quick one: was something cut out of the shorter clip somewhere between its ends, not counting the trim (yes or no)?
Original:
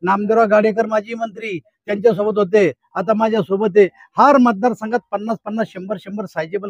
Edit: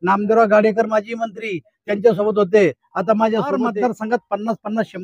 yes